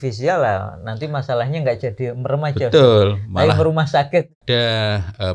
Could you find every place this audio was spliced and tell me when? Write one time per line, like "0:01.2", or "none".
0:04.3